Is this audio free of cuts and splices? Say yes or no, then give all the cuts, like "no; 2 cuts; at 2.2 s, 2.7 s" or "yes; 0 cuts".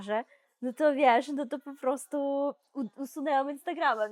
yes; 0 cuts